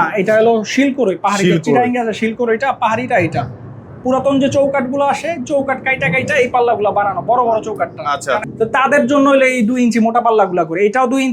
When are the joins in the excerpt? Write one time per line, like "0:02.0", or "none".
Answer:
0:08.5